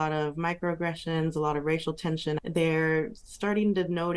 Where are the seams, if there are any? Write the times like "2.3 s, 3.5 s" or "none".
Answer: 2.4 s

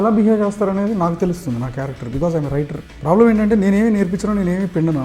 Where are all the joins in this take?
2.8 s

